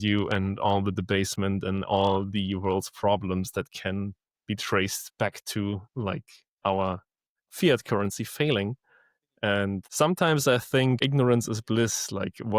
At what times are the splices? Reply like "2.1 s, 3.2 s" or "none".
9.8 s, 11.0 s